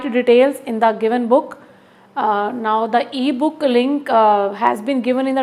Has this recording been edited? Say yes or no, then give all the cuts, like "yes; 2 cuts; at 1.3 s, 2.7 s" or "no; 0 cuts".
no; 0 cuts